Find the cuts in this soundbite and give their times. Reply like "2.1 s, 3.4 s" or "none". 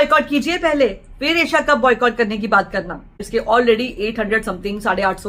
3.3 s